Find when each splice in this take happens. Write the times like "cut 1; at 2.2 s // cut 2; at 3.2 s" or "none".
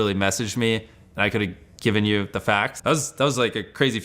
cut 1; at 2.7 s